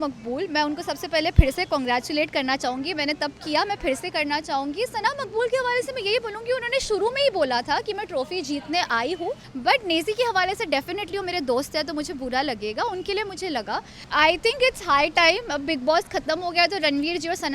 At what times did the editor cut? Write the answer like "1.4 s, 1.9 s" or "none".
9.5 s, 13.9 s